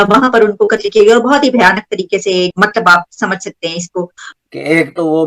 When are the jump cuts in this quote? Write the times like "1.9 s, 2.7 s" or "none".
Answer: 2.5 s, 4.2 s